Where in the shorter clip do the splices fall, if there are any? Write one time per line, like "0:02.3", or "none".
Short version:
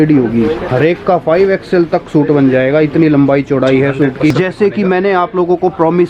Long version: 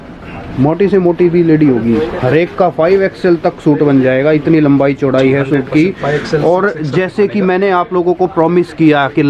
0:04.3